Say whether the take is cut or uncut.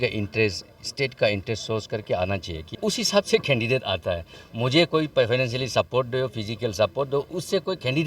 cut